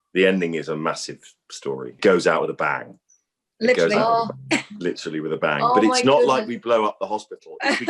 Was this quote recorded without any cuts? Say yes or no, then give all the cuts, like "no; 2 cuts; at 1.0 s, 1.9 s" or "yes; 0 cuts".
no; 1 cut; at 2.0 s